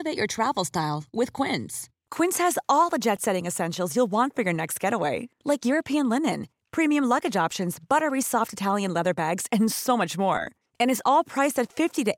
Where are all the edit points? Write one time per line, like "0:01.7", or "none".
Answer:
none